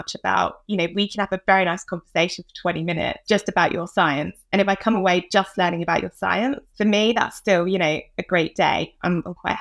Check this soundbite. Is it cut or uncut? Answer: cut